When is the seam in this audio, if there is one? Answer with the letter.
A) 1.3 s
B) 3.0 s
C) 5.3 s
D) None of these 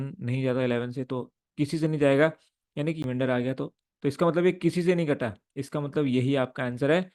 B